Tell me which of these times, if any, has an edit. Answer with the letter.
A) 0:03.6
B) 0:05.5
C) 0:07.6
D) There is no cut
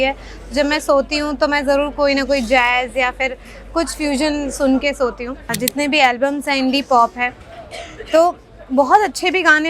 B